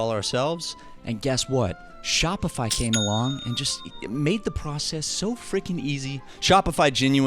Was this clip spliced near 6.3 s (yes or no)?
yes